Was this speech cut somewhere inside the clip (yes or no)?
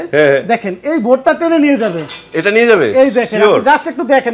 no